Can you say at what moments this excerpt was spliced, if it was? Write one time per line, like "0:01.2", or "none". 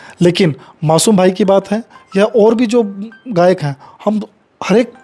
none